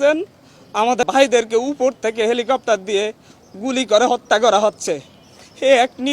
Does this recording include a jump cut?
yes; 1 cut; at 1.0 s

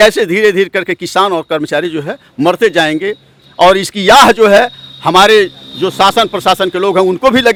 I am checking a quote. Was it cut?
no; 0 cuts

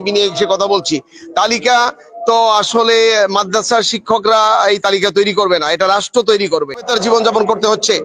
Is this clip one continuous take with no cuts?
no; 1 cut; at 6.9 s

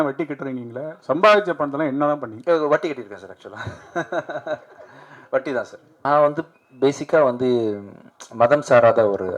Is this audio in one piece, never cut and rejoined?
no; 1 cut; at 5.9 s

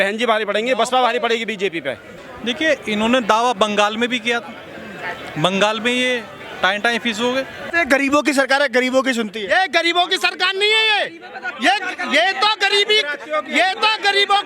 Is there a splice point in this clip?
yes; 2 cuts; at 2.1 s, 7.6 s

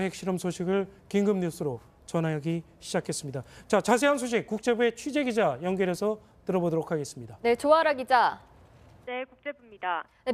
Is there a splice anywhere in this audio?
no; 0 cuts

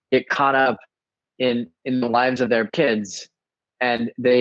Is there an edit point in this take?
yes; 1 cut; at 2.7 s

